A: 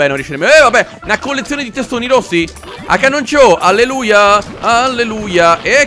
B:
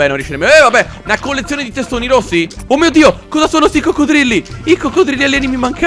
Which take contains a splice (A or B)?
B